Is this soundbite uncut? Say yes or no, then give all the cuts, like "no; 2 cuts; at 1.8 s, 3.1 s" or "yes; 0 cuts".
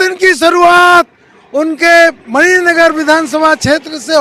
yes; 0 cuts